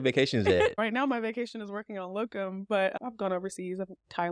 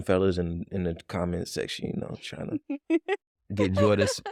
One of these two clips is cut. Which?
first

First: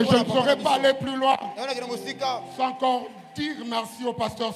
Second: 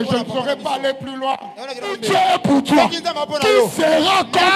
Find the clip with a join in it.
second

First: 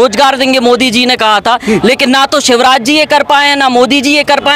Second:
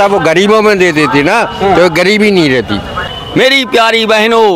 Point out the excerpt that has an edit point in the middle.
second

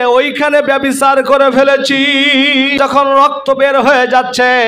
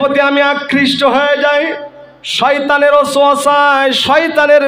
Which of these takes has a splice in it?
first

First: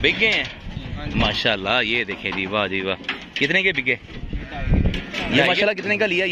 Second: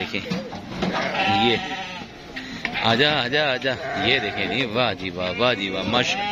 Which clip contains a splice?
first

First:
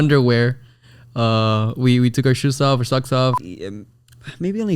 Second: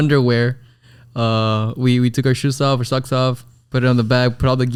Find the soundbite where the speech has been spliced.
first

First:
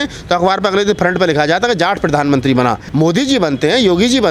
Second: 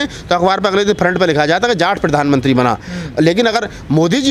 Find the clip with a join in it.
first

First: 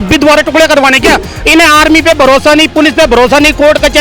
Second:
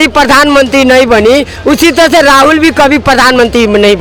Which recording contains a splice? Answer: first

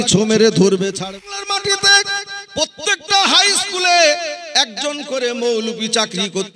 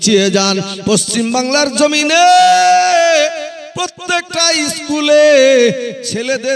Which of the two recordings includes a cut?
first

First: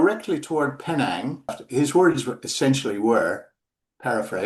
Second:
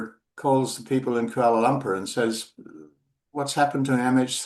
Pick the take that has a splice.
first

